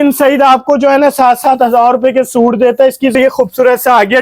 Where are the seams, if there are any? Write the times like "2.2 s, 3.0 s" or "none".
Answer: 3.1 s